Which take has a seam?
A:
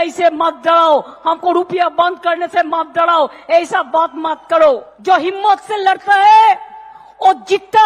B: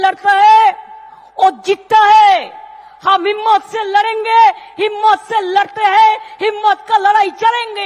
A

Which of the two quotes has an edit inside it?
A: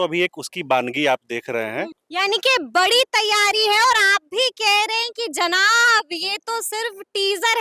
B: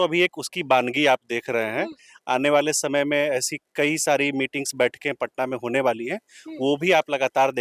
A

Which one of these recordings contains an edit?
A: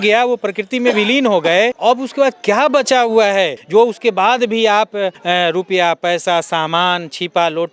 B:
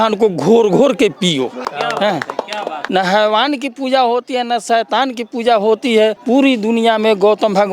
B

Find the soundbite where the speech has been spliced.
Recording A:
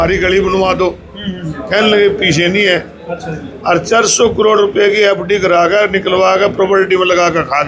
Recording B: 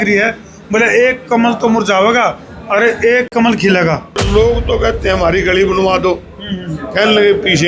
B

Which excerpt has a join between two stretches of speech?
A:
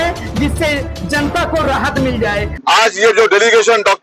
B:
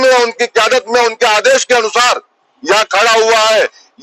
A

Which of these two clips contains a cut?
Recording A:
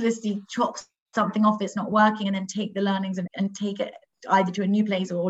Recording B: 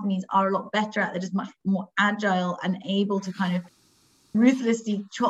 A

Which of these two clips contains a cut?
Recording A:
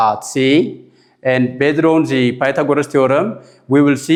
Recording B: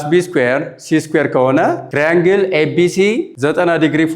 B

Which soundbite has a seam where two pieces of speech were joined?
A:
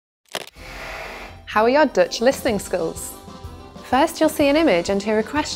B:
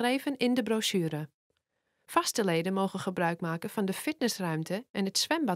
A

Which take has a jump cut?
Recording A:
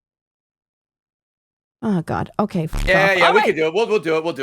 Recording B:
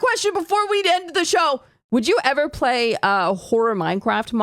B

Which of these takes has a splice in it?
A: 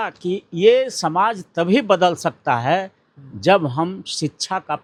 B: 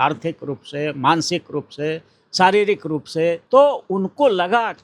B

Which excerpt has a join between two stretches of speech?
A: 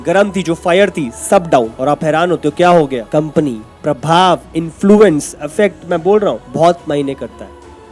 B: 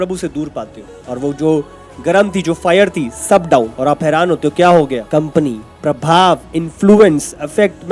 B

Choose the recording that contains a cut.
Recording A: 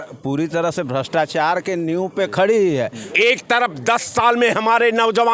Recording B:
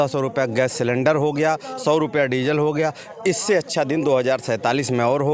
A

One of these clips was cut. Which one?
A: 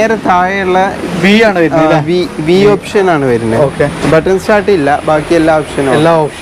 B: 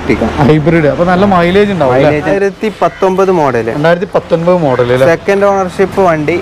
B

